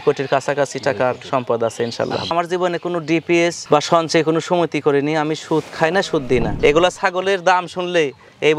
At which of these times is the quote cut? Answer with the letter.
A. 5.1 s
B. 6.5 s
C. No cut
B